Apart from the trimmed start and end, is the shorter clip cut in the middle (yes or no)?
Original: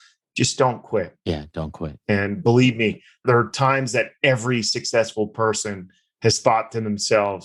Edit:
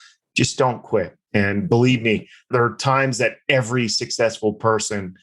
yes